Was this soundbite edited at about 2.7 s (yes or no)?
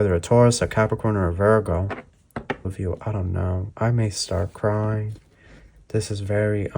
yes